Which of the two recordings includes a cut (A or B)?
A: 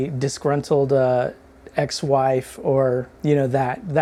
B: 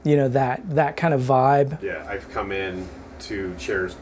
B